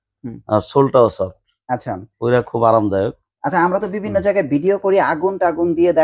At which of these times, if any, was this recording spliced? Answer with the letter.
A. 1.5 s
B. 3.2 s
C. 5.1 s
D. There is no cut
D